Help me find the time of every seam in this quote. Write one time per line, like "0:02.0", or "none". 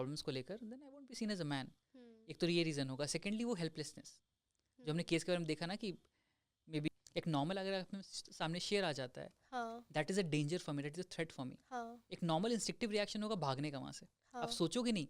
0:06.9

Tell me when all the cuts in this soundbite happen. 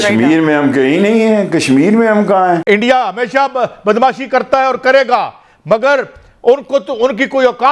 0:02.6

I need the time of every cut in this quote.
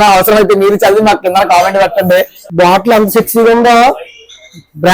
0:02.4

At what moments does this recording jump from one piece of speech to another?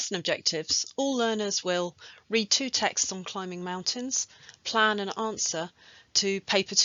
none

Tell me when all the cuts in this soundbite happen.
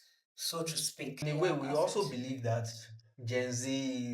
0:01.2

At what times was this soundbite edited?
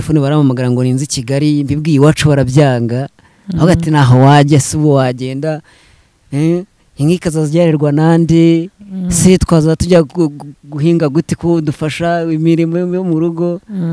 none

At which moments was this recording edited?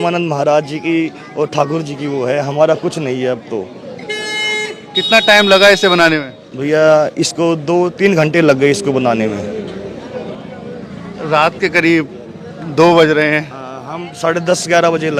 none

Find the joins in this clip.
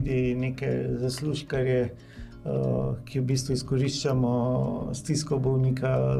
none

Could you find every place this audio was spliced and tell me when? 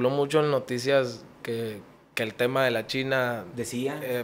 none

